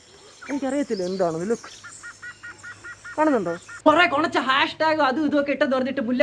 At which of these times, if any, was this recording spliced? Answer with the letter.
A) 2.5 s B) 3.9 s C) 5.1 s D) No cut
B